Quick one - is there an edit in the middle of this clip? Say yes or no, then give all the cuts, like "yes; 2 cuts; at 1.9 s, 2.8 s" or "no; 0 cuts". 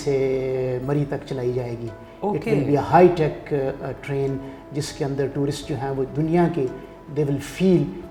no; 0 cuts